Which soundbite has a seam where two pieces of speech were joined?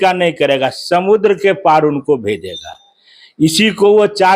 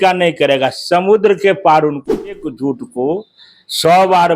second; 1 cut; at 2.5 s

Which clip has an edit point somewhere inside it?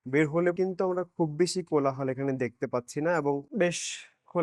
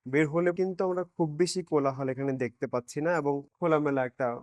second; 1 cut; at 3.5 s

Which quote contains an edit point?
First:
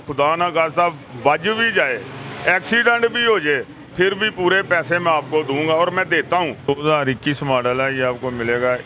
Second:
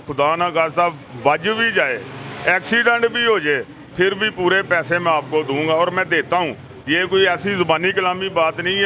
first; 1 cut; at 6.8 s

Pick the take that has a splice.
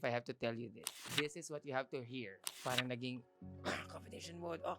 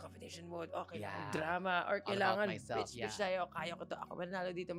first; 2 cuts; at 1.0 s, 2.6 s

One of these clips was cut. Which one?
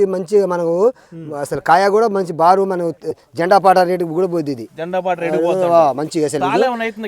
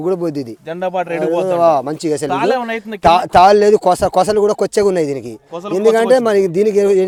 first; 1 cut; at 3.1 s

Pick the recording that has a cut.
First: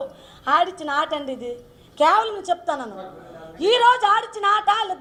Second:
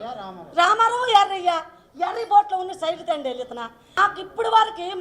second; 1 cut; at 4.0 s

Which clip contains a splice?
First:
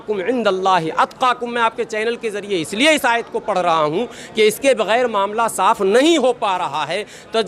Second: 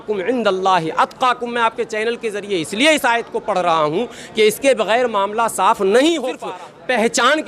second; 1 cut; at 6.5 s

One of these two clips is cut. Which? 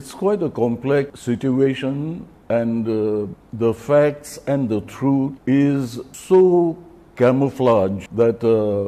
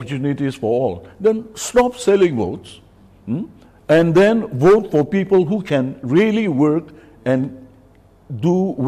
first; 6 cuts; at 1.2 s, 2.3 s, 3.4 s, 5.4 s, 6.1 s, 8.0 s

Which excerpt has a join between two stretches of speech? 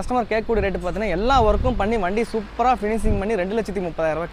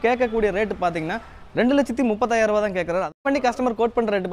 second; 1 cut; at 3.2 s

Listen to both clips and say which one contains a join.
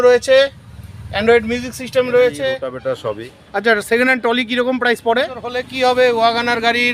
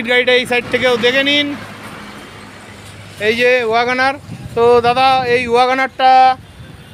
first; 2 cuts; at 2.7 s, 5.6 s

